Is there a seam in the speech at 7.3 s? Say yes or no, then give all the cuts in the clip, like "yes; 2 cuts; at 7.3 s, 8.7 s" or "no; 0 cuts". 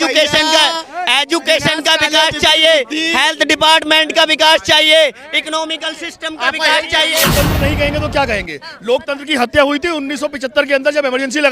yes; 1 cut; at 7.3 s